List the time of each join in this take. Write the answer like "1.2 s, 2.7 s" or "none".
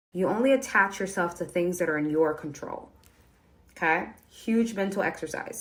none